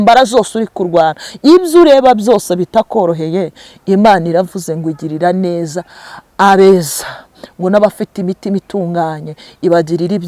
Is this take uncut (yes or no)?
yes